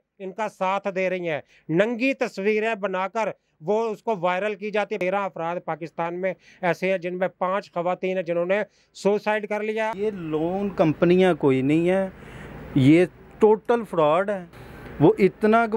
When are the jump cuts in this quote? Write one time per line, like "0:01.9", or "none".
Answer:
0:01.5
0:05.0
0:09.9